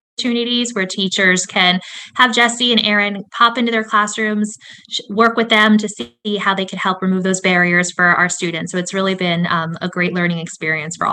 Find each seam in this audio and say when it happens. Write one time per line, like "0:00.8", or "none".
none